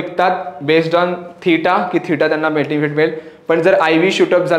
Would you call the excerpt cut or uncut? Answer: uncut